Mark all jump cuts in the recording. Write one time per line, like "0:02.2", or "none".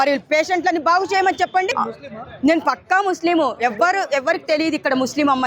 0:01.7

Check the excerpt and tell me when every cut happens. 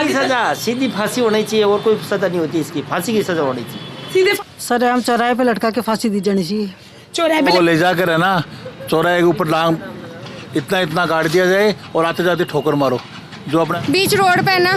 0:04.4
0:07.5
0:13.7

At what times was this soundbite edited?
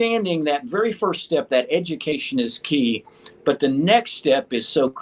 none

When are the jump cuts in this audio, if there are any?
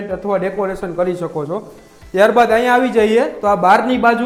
none

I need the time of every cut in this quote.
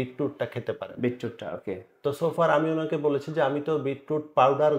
none

